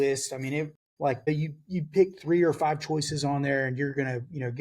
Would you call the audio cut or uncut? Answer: cut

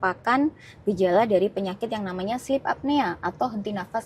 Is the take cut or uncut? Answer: uncut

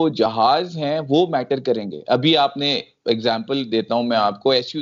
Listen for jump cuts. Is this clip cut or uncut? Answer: uncut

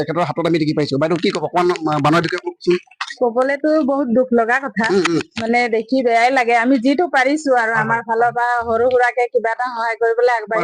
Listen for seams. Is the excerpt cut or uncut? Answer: uncut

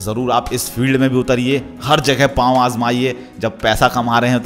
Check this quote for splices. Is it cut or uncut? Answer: uncut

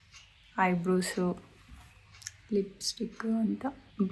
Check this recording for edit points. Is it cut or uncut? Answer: uncut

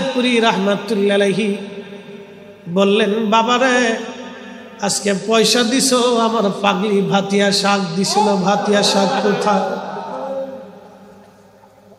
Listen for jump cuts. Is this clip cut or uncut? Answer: uncut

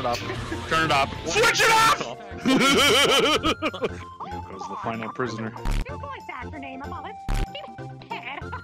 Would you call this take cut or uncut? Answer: cut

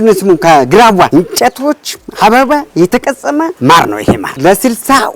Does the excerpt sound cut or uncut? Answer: cut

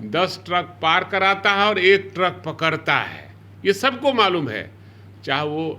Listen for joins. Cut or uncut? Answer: uncut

